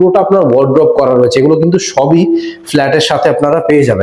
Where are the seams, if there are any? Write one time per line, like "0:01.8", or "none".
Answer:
none